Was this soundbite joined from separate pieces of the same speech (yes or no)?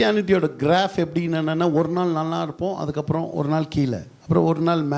no